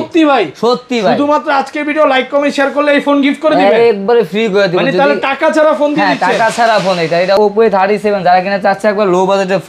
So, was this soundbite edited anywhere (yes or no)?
yes